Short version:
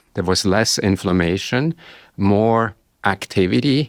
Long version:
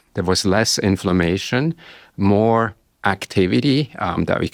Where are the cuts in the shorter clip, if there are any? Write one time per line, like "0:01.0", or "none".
none

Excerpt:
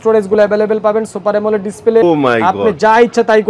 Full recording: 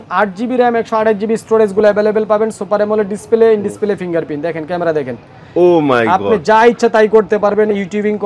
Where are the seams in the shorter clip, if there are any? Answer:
0:02.0

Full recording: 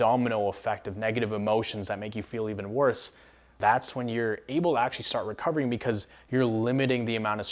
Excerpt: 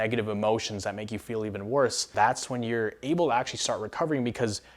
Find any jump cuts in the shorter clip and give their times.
0:02.0

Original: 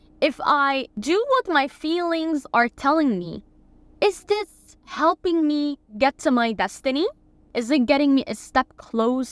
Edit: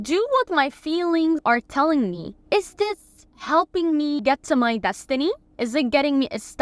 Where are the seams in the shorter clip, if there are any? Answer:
0:01.4
0:02.3
0:04.2
0:05.5

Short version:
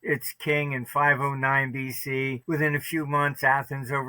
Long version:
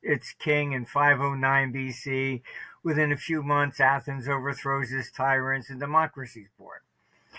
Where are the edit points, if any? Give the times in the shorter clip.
0:02.4

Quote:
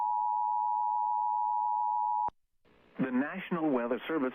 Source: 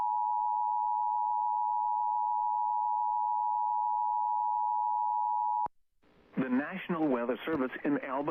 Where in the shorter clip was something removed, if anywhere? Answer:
0:02.3

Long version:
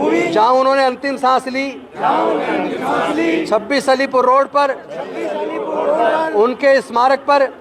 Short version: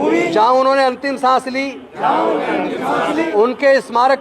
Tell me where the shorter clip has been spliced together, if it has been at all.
0:03.3

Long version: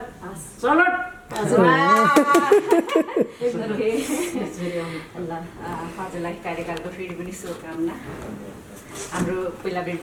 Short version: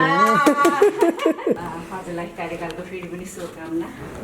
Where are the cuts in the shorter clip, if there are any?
0:01.6

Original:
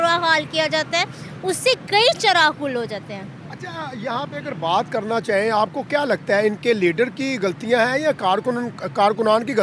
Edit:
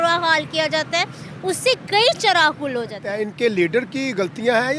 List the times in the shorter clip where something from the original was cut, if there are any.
0:03.1

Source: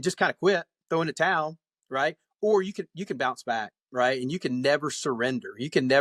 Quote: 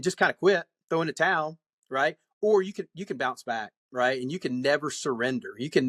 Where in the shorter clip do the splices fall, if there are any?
none

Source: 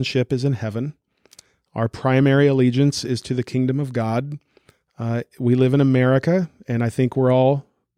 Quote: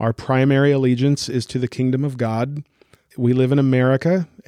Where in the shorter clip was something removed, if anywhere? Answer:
0:03.1

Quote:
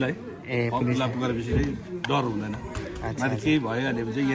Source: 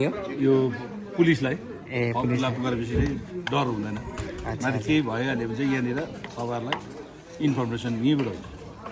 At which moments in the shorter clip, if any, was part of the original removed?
none

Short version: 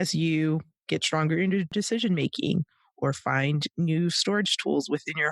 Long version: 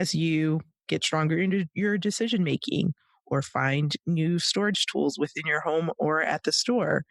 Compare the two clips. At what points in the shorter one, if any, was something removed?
0:01.7

